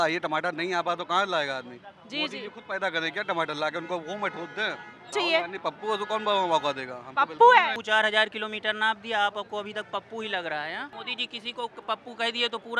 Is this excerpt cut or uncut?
cut